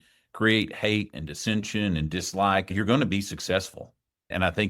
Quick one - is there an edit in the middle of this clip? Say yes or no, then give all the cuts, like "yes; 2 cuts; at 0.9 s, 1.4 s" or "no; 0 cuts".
yes; 1 cut; at 2.7 s